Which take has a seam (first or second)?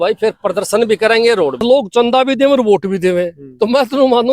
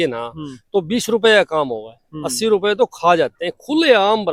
first